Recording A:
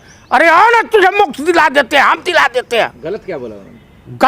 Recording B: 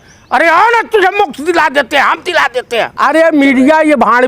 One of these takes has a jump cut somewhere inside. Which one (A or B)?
B